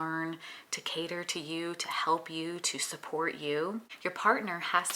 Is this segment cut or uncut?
cut